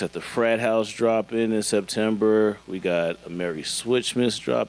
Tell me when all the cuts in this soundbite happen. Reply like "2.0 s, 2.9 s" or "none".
none